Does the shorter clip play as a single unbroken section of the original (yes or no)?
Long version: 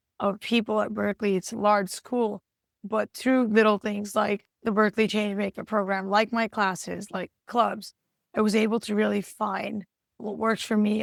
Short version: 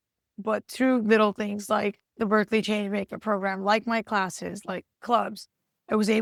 yes